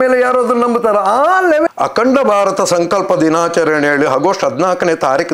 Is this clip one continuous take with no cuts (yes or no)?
no